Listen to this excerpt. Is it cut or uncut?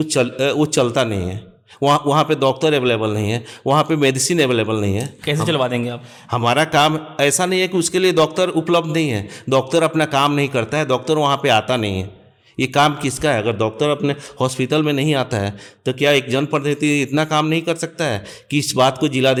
uncut